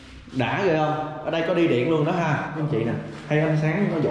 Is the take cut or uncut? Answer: cut